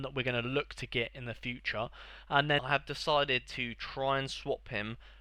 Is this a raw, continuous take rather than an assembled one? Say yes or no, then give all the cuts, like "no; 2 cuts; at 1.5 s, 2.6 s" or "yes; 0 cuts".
no; 1 cut; at 2.6 s